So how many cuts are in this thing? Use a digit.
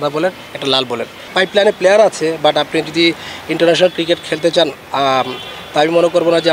1